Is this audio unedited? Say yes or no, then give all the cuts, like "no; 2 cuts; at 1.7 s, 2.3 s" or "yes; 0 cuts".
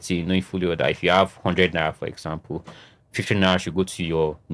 yes; 0 cuts